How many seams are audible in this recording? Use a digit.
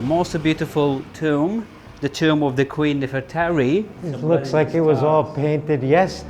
1